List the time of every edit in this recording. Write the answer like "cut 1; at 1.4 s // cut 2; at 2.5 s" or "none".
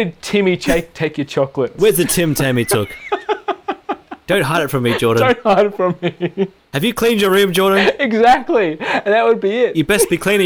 cut 1; at 1.7 s